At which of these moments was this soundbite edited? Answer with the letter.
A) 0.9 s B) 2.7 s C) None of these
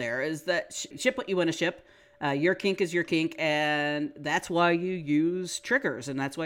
A